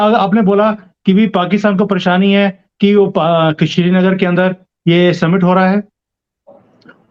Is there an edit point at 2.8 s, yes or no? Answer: no